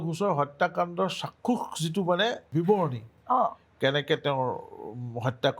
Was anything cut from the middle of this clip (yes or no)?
yes